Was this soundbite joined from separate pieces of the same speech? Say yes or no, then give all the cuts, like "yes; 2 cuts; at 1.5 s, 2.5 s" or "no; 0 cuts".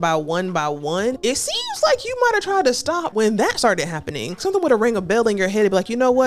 yes; 3 cuts; at 1.2 s, 3.1 s, 4.4 s